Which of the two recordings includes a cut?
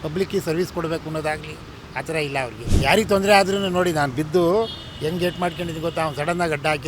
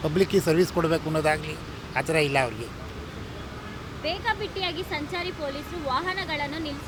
first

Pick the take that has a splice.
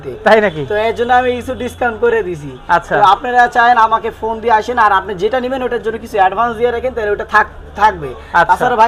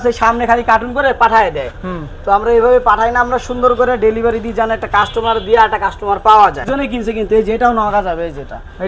second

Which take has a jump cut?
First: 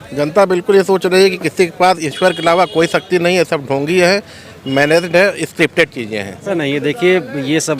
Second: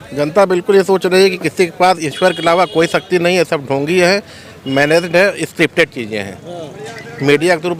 first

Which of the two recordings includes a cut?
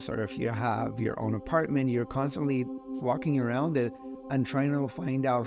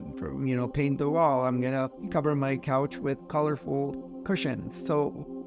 second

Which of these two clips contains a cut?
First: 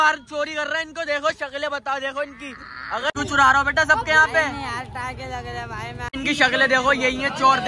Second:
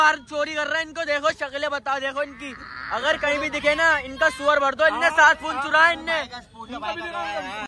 first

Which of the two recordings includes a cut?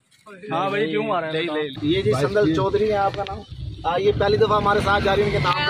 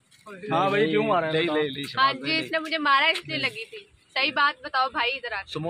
first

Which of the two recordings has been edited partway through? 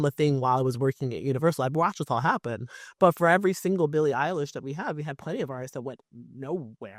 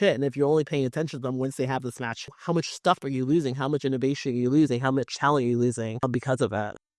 second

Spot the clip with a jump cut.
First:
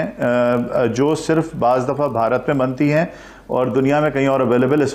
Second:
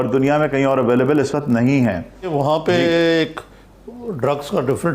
second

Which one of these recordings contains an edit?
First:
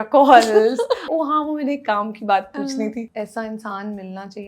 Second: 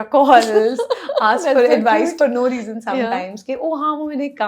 first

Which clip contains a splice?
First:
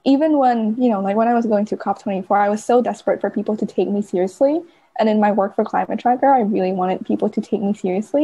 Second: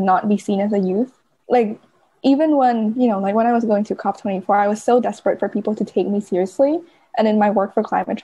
second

